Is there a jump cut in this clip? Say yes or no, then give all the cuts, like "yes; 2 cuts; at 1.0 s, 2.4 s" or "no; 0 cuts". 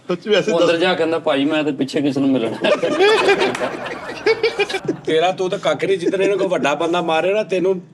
yes; 1 cut; at 4.8 s